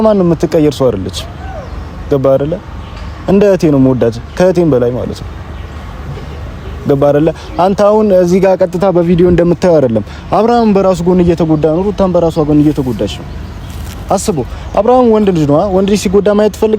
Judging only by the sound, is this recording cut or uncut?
uncut